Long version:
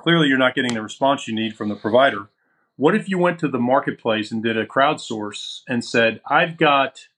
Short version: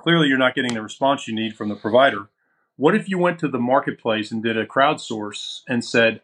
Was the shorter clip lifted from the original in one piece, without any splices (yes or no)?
yes